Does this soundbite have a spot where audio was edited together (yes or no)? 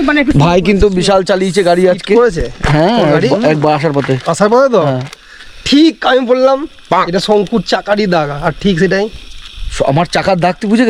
no